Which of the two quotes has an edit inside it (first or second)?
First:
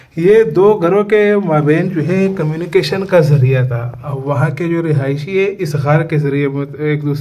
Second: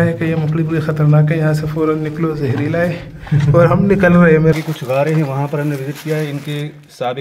second